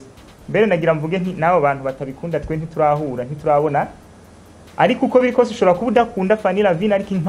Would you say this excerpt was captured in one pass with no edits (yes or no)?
yes